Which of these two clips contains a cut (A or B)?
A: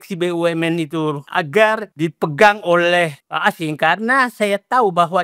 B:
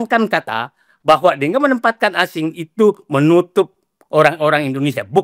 A